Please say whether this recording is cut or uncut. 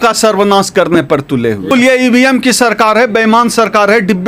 cut